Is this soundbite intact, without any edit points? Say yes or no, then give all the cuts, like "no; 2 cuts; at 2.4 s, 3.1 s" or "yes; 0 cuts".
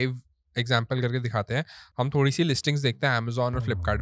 yes; 0 cuts